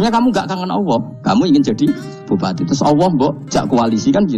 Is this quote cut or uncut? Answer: cut